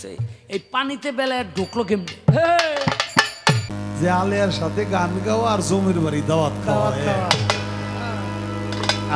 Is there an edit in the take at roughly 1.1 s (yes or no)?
no